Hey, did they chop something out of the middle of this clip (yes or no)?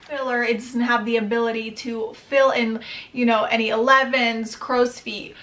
no